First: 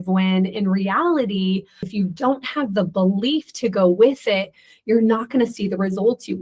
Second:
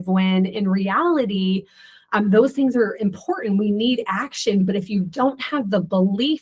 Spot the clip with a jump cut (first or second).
first